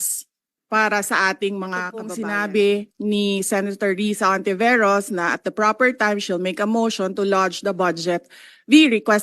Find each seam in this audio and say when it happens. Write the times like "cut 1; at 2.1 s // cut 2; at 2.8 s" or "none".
cut 1; at 2.1 s